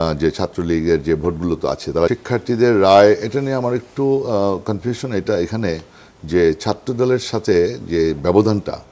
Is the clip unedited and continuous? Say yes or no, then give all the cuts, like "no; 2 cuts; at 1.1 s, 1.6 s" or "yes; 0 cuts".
no; 1 cut; at 2.1 s